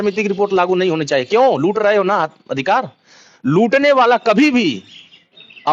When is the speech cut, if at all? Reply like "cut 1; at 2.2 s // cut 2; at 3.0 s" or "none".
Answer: none